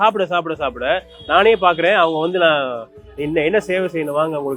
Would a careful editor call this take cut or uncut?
uncut